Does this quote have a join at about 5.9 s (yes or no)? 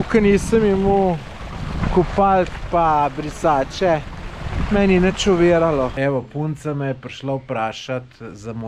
yes